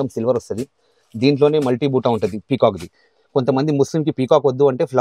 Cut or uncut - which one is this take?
uncut